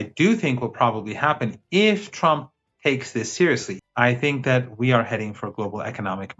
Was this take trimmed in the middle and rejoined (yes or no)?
yes